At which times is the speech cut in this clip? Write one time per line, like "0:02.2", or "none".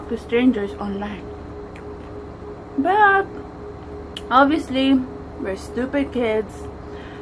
none